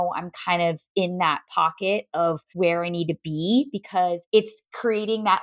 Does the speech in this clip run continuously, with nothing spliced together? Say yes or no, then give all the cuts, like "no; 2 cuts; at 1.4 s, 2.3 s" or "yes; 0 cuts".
no; 2 cuts; at 2.4 s, 4.2 s